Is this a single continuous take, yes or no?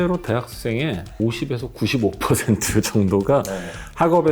no